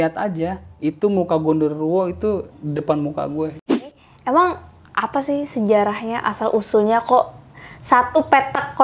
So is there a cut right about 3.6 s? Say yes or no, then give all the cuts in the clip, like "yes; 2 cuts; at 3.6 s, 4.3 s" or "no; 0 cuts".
yes; 1 cut; at 3.6 s